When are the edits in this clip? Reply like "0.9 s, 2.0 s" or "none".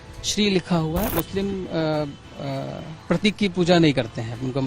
1.1 s